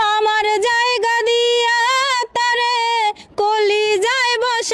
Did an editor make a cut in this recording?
no; 0 cuts

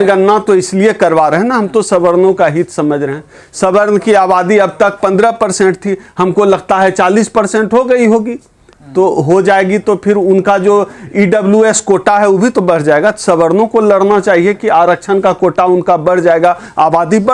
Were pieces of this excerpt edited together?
no; 0 cuts

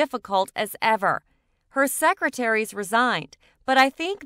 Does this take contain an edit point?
no; 0 cuts

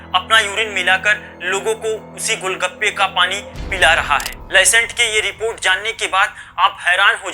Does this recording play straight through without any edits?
no; 1 cut; at 4.3 s

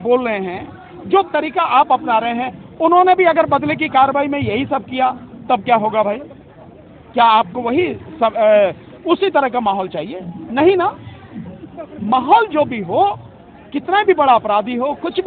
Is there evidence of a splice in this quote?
no; 0 cuts

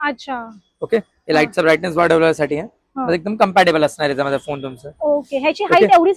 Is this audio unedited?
yes; 0 cuts

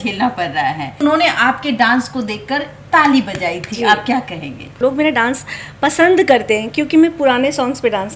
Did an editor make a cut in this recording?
yes; 2 cuts; at 1.0 s, 4.7 s

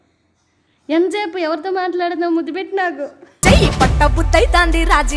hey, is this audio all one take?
yes; 0 cuts

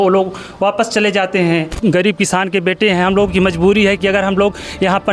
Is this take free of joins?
no; 1 cut; at 1.7 s

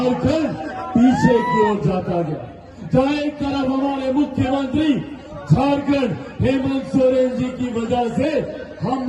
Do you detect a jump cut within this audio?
no; 0 cuts

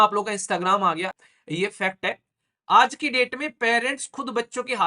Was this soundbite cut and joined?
yes; 1 cut; at 1.2 s

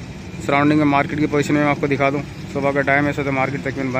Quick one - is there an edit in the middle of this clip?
no; 0 cuts

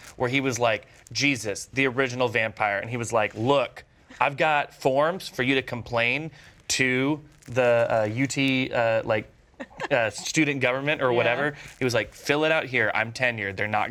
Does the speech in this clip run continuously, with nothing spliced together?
yes; 0 cuts

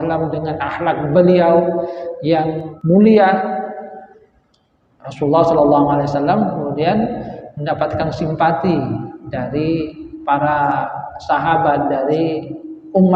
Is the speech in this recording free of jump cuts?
no; 1 cut; at 2.7 s

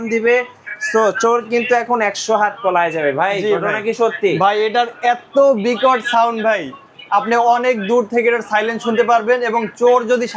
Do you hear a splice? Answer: no; 0 cuts

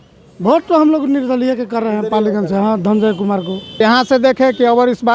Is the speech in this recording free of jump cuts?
no; 1 cut; at 3.8 s

